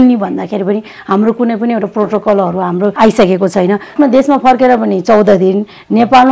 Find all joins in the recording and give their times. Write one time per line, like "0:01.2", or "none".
0:02.9
0:03.9